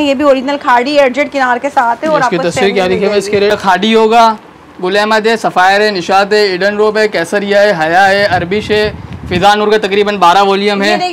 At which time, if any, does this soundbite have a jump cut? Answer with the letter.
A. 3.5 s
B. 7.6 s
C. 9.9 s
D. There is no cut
A